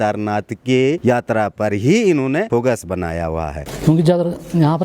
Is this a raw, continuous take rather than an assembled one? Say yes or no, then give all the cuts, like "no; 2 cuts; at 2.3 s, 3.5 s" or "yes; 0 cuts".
no; 3 cuts; at 1.0 s, 2.5 s, 3.7 s